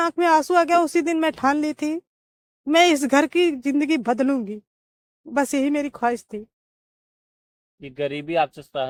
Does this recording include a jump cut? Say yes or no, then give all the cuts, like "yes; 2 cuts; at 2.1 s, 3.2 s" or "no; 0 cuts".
no; 0 cuts